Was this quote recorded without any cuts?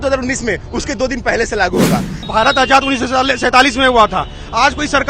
no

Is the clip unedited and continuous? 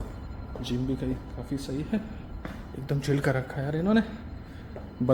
yes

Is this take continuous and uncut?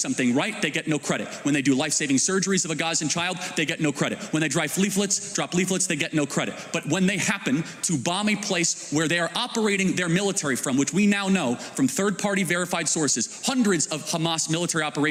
yes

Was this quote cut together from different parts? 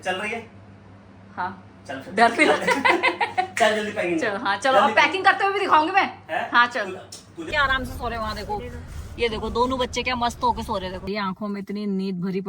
yes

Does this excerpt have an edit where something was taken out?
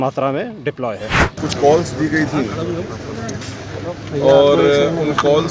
yes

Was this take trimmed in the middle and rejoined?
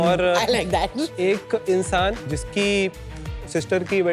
yes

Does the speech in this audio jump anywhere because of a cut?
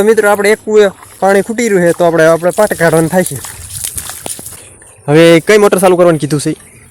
yes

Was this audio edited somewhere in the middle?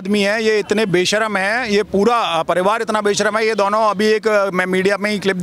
no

